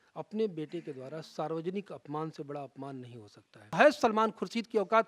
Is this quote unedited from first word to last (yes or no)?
no